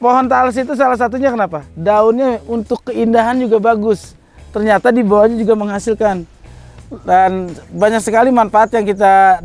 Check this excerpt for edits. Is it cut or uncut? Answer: uncut